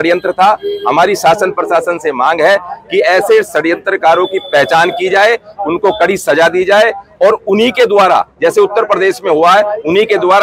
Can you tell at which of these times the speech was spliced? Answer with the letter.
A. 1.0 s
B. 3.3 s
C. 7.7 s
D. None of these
D